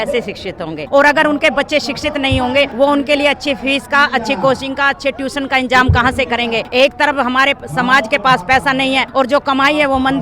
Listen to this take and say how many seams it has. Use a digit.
4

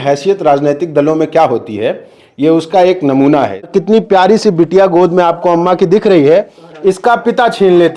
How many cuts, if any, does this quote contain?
1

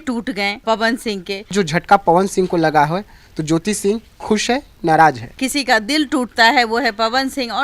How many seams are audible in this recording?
2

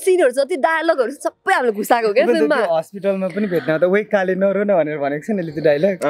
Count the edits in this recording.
0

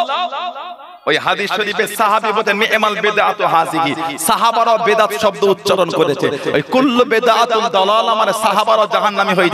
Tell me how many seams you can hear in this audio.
0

